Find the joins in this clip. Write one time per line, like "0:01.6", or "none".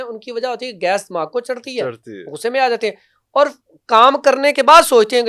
none